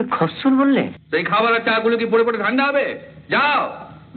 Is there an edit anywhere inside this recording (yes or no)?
yes